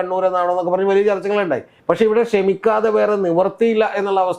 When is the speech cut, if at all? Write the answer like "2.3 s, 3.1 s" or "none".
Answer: 1.7 s